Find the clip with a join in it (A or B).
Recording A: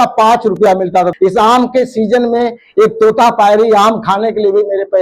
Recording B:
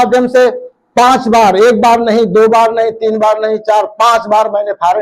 A